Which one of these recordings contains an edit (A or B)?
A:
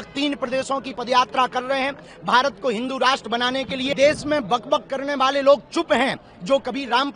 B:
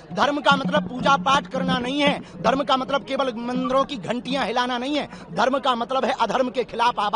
A